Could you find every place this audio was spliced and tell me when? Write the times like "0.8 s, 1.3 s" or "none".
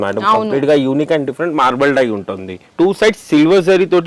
2.7 s